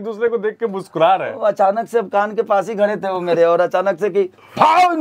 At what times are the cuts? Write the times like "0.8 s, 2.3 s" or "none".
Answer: none

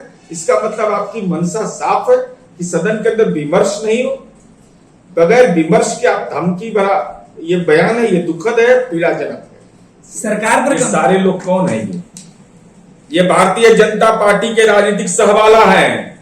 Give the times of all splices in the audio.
10.8 s

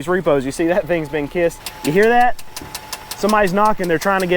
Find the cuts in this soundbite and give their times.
1.7 s

